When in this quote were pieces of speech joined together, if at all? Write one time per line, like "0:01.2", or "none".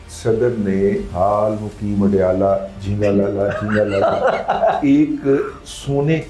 0:01.1
0:04.8

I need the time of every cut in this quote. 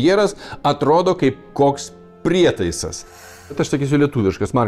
0:03.3

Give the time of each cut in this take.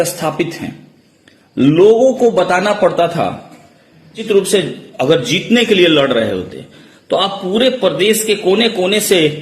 0:04.2

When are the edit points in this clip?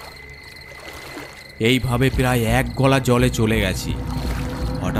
none

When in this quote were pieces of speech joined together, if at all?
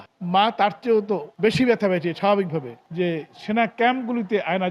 0:02.8

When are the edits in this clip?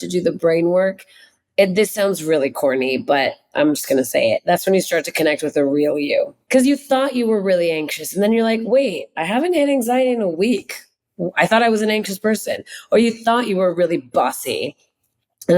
0:06.4

